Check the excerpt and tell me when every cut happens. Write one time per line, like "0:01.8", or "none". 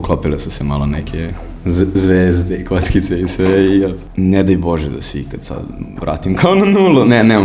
0:04.0

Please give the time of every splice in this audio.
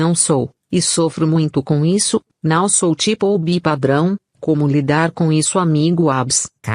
0:02.3

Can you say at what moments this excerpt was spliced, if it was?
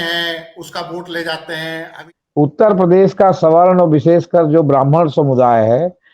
0:01.9

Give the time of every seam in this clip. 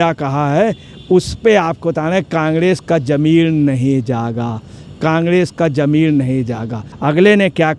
0:06.8

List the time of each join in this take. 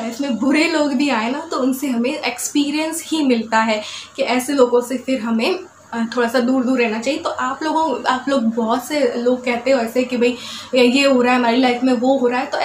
none

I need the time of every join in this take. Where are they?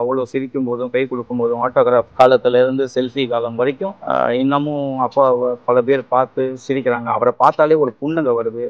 0:02.1
0:04.0

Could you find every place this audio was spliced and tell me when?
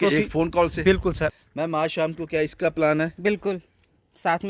0:01.3

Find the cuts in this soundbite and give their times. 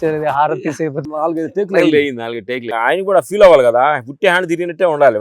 0:01.0
0:02.7

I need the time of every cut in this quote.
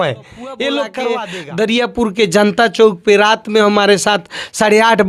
0:01.1

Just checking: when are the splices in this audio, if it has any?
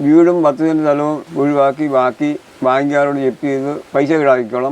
0:01.2
0:02.5
0:03.8

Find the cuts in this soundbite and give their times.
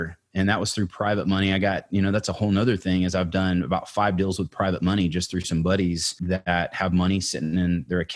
0:06.2

